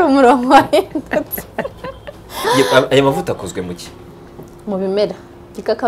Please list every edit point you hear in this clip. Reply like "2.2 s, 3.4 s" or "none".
2.3 s

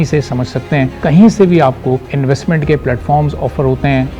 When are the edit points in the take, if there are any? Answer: 1.0 s, 2.1 s

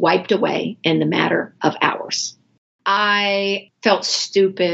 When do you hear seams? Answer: 2.8 s, 3.7 s

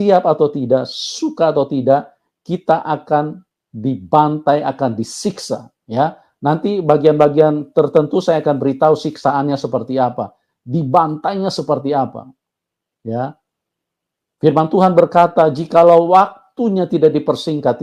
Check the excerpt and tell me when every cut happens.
none

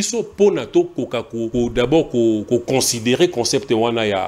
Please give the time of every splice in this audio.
1.4 s

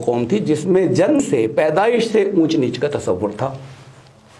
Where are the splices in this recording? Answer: 1.2 s

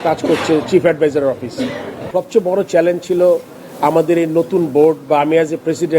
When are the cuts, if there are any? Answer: 2.0 s

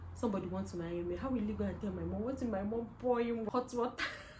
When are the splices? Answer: 3.5 s

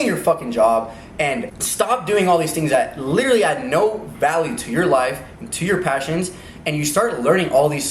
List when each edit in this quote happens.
1.6 s

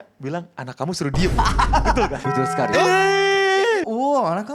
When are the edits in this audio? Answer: 2.2 s, 3.8 s

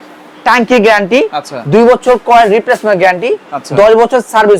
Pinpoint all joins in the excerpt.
none

